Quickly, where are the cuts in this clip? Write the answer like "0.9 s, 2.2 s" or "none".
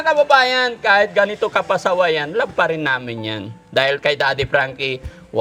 none